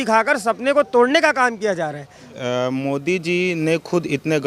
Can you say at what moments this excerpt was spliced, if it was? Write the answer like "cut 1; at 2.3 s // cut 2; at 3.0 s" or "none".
cut 1; at 2.4 s